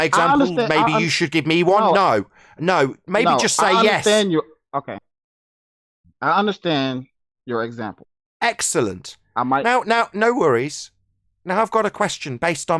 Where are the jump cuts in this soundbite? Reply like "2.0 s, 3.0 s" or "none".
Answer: none